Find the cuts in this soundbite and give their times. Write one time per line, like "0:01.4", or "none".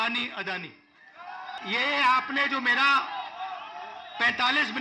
0:01.6